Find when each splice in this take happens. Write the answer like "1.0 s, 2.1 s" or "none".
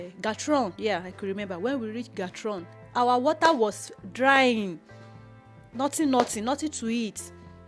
2.8 s